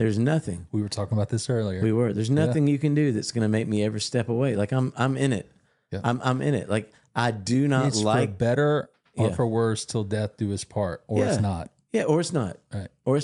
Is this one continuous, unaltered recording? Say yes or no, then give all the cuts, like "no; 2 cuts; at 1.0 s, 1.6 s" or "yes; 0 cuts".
yes; 0 cuts